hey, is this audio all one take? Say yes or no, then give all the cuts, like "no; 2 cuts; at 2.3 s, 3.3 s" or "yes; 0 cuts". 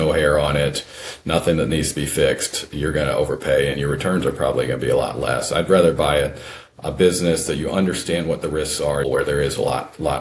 no; 1 cut; at 9.1 s